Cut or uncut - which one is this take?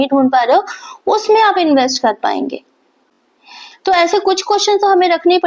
uncut